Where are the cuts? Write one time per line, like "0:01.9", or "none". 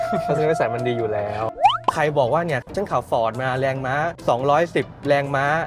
0:01.5
0:02.7